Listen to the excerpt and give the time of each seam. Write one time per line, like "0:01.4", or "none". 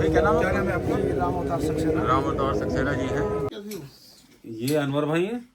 0:03.5